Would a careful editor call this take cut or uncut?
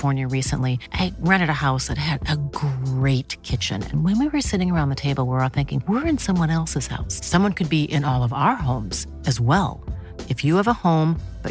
uncut